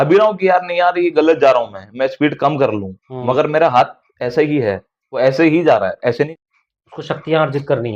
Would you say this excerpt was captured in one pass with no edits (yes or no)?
no